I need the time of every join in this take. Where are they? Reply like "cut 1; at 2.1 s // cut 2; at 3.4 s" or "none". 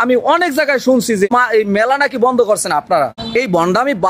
cut 1; at 1.3 s // cut 2; at 3.2 s